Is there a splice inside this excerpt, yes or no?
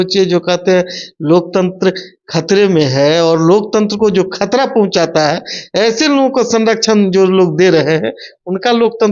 no